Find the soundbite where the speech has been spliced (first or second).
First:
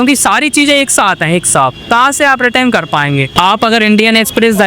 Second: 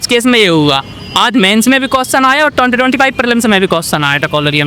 first